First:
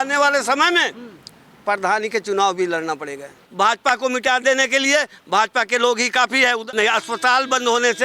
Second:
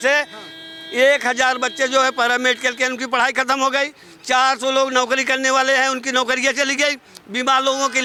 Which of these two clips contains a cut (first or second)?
first